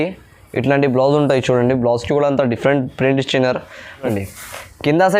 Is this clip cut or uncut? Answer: cut